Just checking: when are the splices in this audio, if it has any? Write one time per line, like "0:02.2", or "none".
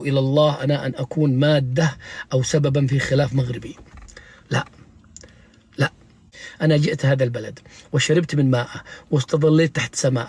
0:06.1

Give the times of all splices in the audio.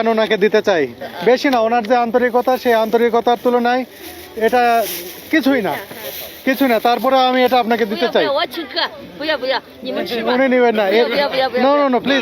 0:01.0

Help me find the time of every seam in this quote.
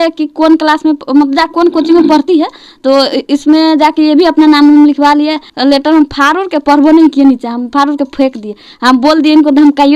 0:05.5

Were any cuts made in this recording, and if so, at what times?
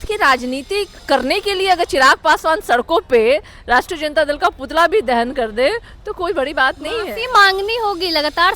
0:01.0

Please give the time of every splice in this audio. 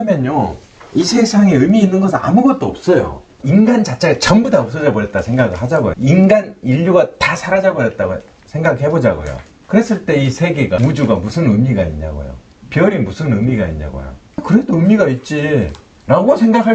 0:03.3
0:05.9

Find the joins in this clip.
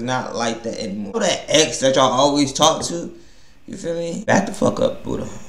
0:01.1
0:04.3

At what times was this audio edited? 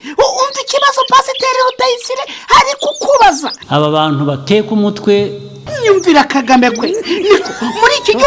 0:03.6
0:05.6

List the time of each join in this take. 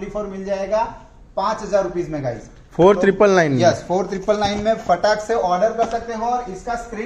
none

